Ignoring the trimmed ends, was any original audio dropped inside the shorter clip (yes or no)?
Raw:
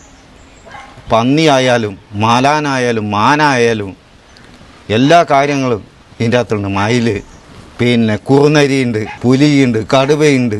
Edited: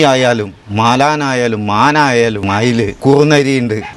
yes